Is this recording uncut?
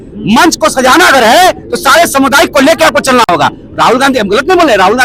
yes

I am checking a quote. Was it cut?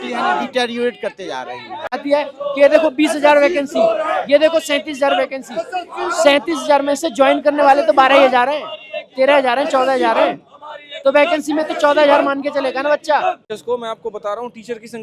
yes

